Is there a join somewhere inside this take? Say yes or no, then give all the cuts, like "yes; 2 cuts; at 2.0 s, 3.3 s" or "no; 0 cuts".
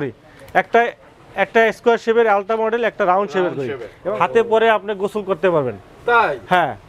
yes; 1 cut; at 3.9 s